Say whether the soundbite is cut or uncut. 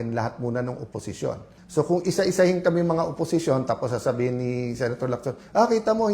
cut